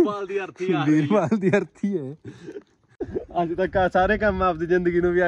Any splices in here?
yes; 1 cut; at 3.0 s

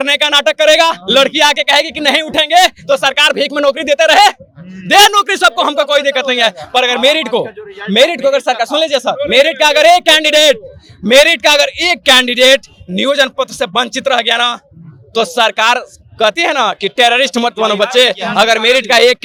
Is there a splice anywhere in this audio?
no; 0 cuts

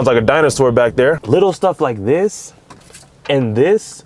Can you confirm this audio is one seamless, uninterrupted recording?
no; 1 cut; at 1.2 s

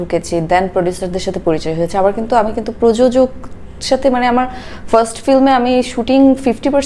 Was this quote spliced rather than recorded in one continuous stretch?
no; 0 cuts

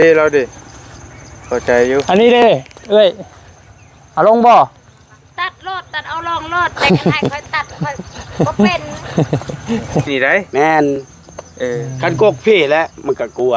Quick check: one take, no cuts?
no; 1 cut; at 10.1 s

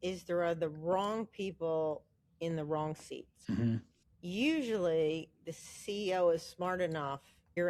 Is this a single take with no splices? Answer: yes; 0 cuts

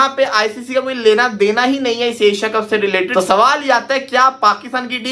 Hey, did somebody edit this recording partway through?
yes; 1 cut; at 3.1 s

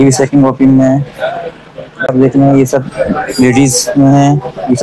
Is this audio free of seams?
no; 1 cut; at 2.1 s

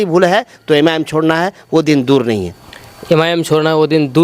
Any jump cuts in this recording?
no; 0 cuts

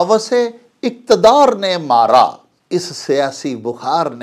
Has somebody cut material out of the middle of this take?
yes; 1 cut; at 2.5 s

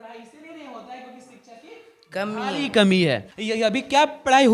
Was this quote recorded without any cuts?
yes; 0 cuts

